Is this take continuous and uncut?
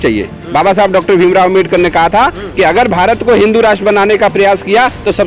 yes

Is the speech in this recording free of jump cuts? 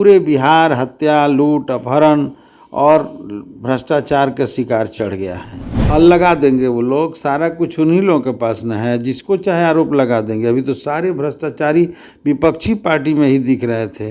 no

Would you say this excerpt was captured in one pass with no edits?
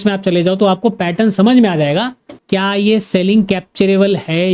yes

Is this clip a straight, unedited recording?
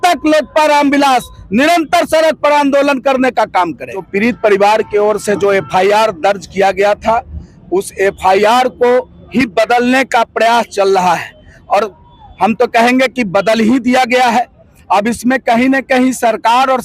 no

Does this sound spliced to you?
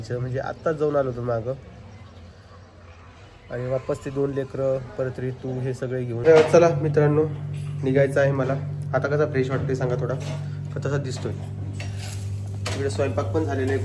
yes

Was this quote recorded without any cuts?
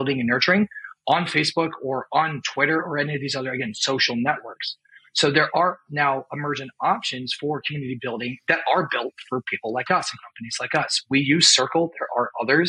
yes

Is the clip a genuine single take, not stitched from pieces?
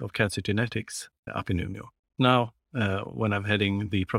no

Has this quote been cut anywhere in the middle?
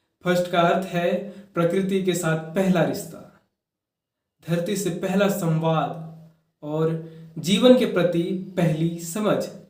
no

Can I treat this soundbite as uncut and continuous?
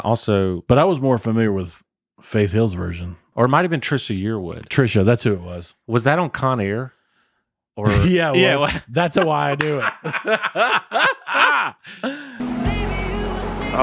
no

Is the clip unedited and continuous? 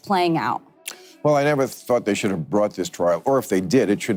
yes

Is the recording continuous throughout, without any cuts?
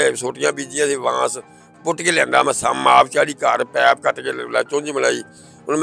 yes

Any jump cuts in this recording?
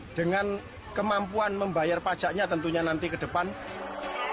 no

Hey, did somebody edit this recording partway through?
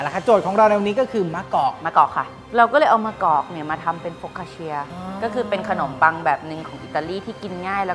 yes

